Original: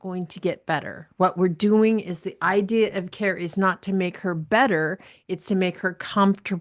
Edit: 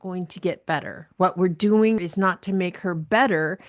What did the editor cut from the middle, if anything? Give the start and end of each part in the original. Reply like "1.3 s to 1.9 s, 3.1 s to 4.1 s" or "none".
2.1 s to 3.5 s